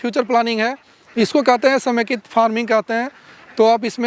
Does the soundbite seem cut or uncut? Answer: cut